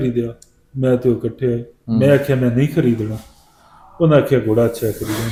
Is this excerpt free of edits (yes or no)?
yes